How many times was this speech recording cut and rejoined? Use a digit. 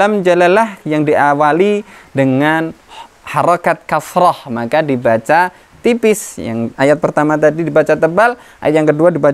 0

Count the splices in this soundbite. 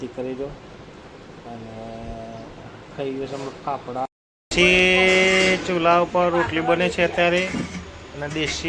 1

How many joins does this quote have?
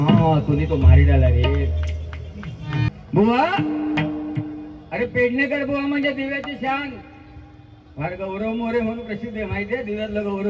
1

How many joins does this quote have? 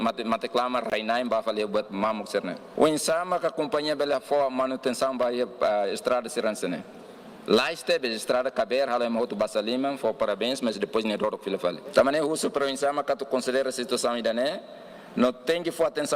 2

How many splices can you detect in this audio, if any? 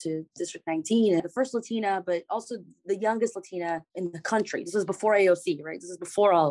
1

